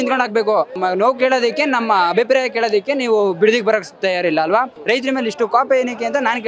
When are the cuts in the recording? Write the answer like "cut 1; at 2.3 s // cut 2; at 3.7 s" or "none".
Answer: cut 1; at 0.8 s // cut 2; at 4.7 s